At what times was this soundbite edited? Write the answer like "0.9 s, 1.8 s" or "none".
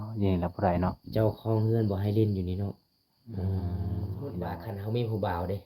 4.6 s